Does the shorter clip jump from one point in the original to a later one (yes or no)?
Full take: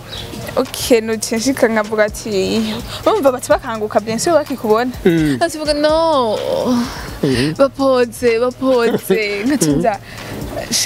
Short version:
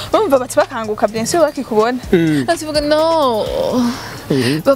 no